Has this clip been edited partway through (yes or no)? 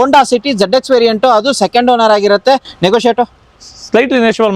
no